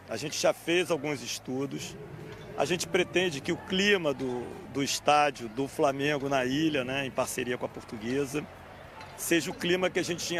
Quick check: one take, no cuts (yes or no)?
yes